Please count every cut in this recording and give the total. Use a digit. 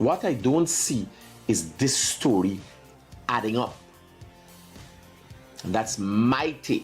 2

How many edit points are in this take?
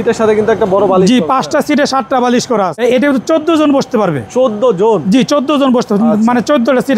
1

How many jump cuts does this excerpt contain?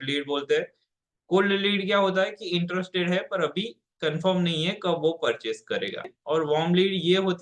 1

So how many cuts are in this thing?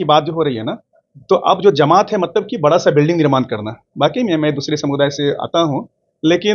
0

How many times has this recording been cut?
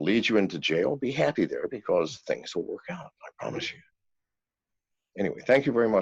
0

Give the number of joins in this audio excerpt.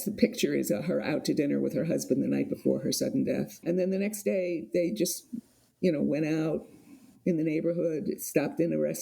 1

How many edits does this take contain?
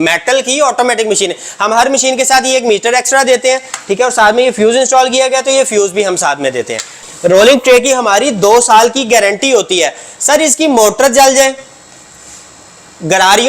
1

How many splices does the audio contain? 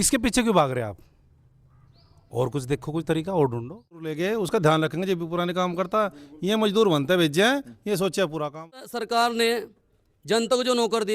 2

